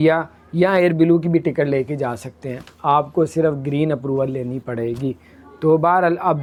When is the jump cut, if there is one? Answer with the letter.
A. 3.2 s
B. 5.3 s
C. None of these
C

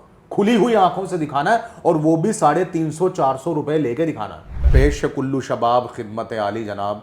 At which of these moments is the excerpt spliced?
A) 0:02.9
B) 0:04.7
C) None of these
B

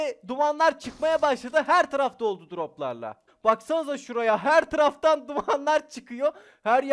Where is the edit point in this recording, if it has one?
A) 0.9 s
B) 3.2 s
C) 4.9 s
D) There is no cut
B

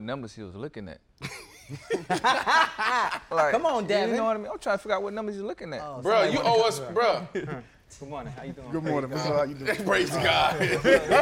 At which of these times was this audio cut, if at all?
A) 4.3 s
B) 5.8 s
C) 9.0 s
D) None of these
B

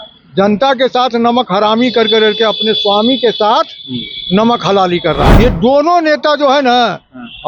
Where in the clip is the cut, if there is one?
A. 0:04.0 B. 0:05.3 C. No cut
B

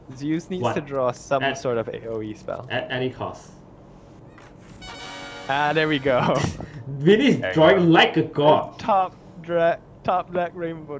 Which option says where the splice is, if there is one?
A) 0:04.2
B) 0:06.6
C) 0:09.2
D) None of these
A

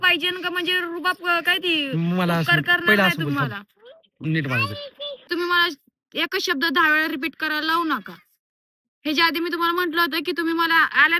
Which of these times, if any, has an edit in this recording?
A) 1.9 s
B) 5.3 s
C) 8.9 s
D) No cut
B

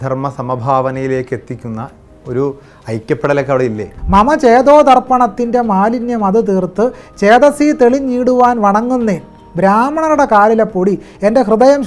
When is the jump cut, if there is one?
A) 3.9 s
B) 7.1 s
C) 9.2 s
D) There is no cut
A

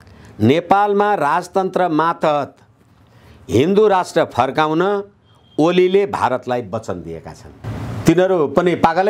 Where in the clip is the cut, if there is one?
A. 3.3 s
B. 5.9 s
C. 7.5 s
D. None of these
C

